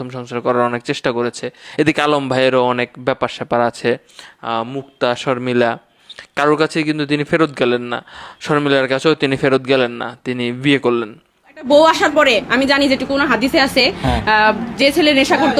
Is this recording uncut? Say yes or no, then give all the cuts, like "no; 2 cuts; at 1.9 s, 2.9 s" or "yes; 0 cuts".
no; 1 cut; at 11.7 s